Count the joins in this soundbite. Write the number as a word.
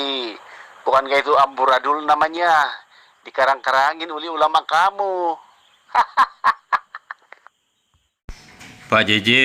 zero